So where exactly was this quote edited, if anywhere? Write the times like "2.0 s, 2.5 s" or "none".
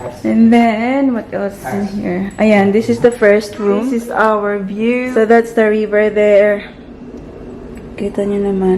3.8 s, 5.1 s

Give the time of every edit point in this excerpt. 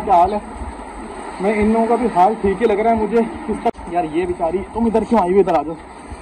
3.7 s

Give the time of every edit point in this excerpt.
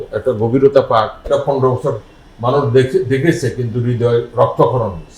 1.2 s

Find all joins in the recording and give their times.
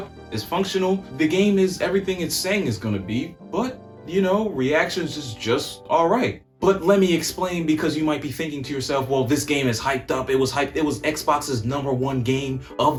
none

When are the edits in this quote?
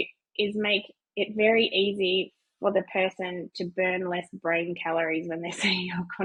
none

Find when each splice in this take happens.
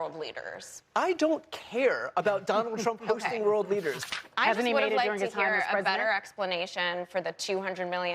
4.0 s

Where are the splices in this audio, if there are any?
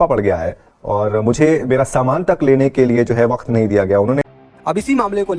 4.4 s

